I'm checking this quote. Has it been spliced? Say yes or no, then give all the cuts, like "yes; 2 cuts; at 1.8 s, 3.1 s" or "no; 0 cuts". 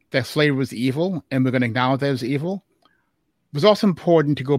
no; 0 cuts